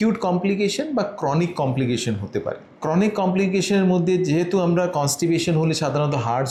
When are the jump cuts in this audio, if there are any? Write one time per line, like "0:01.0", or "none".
none